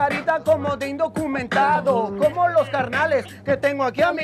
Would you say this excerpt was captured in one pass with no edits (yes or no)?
yes